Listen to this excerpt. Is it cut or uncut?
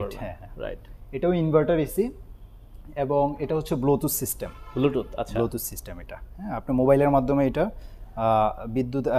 uncut